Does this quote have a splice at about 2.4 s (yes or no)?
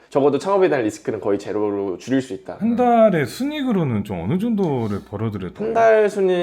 yes